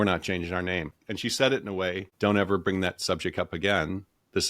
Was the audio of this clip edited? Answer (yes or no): yes